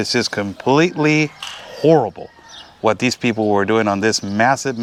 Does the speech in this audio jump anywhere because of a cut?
no; 0 cuts

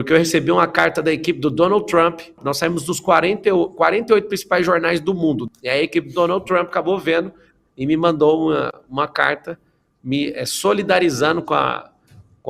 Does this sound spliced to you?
yes; 2 cuts; at 2.4 s, 5.4 s

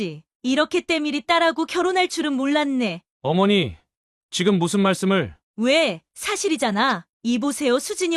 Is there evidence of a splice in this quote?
yes; 1 cut; at 5.4 s

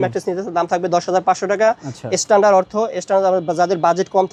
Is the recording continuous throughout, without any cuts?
yes; 0 cuts

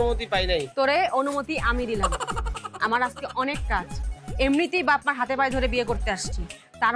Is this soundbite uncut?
yes; 0 cuts

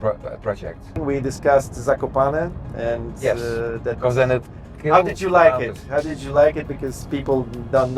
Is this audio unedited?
no; 1 cut; at 1.0 s

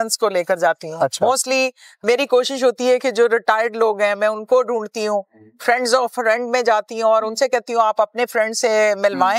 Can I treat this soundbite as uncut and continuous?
yes; 0 cuts

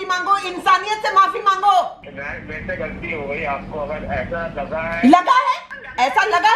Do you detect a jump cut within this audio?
no; 0 cuts

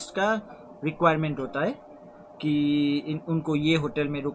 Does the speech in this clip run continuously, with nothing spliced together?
yes; 0 cuts

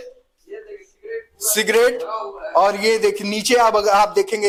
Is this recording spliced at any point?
no; 0 cuts

